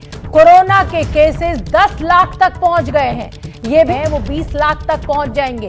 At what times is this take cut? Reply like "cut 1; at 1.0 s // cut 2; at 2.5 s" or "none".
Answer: cut 1; at 3.9 s